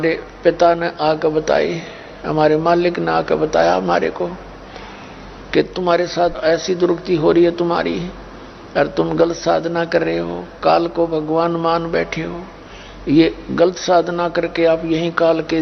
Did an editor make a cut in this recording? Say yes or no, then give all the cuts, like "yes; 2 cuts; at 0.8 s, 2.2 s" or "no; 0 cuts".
no; 0 cuts